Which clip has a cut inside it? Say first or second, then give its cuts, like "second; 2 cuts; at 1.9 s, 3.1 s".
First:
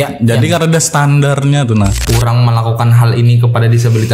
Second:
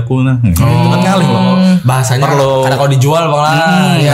first; 1 cut; at 2.0 s